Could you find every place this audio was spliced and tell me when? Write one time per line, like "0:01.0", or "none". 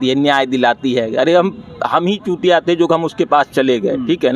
none